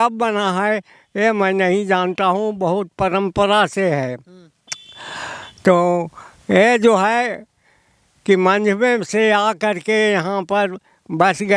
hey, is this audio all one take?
yes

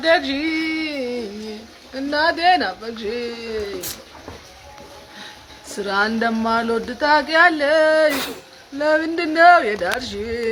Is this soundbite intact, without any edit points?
yes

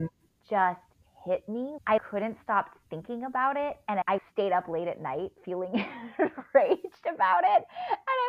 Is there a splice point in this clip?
yes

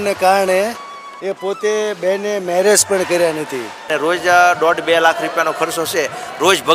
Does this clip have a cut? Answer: yes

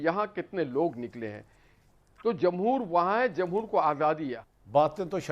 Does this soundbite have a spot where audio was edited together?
yes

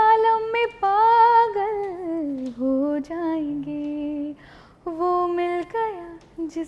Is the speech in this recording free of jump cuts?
yes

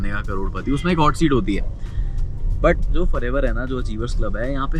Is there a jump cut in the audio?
no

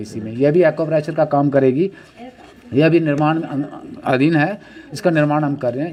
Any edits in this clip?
no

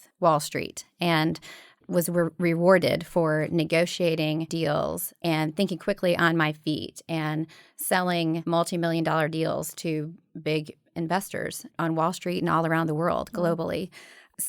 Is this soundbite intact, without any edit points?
no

